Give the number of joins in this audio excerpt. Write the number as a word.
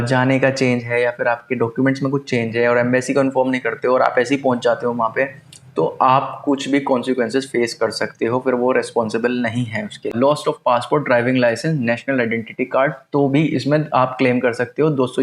one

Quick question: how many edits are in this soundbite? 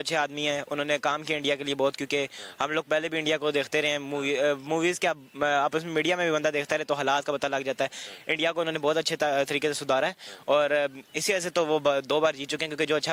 zero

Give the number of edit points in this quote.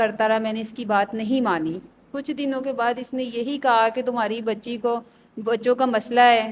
zero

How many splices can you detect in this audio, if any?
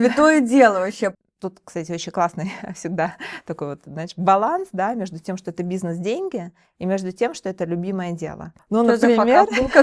two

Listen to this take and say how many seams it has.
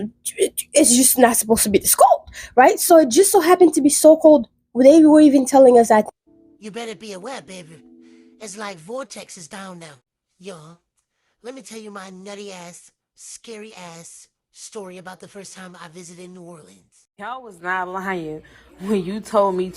two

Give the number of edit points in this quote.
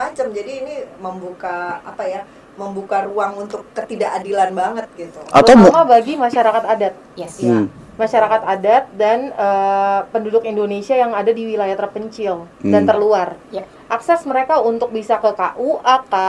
zero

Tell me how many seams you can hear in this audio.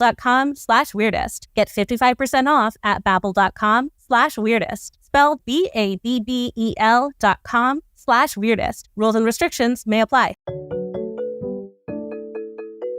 one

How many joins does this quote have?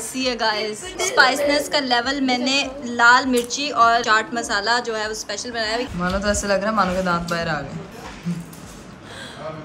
four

